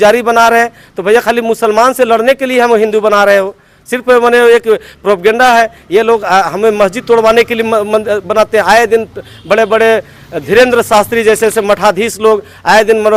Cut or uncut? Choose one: uncut